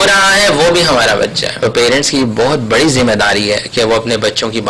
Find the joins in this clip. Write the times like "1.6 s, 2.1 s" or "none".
1.5 s